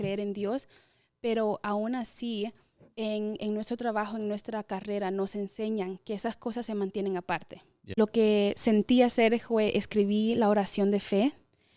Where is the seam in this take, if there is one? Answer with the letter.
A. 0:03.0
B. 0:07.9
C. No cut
B